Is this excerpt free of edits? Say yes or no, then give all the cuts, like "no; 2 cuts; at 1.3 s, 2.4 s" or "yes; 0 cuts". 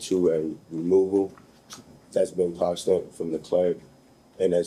yes; 0 cuts